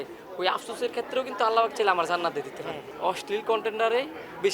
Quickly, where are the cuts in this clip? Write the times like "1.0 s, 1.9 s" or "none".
2.8 s